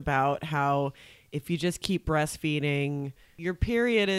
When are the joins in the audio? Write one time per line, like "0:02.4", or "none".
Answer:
0:03.3